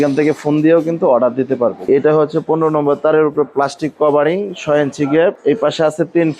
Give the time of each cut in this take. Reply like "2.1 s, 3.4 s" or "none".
1.9 s, 5.4 s